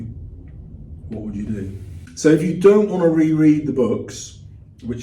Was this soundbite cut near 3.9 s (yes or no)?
no